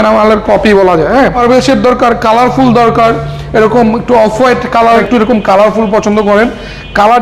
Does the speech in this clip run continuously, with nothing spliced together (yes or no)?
no